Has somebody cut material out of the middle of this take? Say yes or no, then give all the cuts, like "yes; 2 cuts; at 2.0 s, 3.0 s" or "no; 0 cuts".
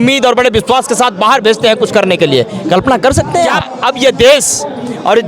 yes; 1 cut; at 3.7 s